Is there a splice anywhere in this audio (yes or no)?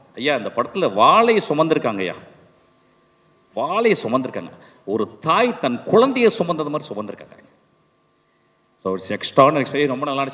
no